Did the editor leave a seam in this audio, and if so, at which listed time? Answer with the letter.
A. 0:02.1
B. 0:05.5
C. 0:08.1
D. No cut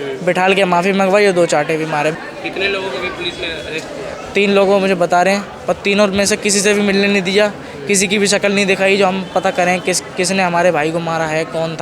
A